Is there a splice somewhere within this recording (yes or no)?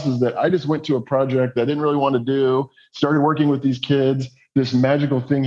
no